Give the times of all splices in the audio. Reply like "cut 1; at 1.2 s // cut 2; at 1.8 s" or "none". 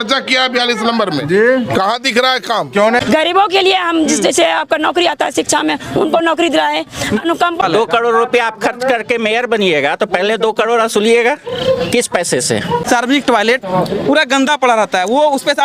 cut 1; at 3.0 s // cut 2; at 7.6 s // cut 3; at 12.8 s